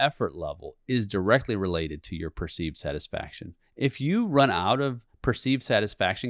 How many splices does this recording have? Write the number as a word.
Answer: zero